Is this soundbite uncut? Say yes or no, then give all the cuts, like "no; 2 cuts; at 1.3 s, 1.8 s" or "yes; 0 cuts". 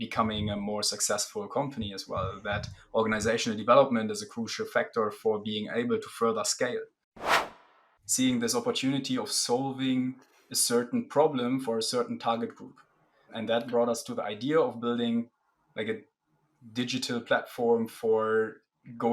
no; 2 cuts; at 7.4 s, 13.3 s